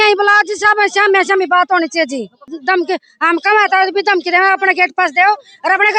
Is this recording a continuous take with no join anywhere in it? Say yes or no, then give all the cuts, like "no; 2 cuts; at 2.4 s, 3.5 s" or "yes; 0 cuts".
no; 1 cut; at 2.5 s